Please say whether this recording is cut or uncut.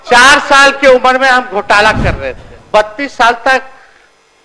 cut